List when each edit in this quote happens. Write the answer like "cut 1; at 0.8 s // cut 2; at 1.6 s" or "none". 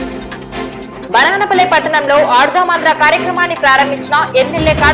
cut 1; at 1.0 s